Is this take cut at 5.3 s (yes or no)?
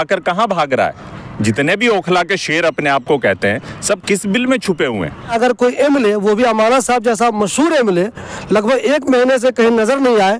yes